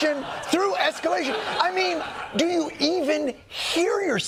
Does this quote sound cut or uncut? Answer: uncut